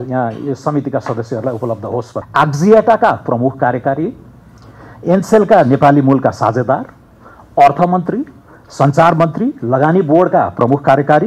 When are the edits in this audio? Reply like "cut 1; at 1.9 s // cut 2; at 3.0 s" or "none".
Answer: cut 1; at 2.2 s